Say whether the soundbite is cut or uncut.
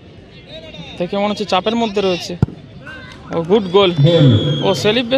uncut